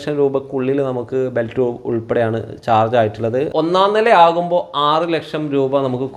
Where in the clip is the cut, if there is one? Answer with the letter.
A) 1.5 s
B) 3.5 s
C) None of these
B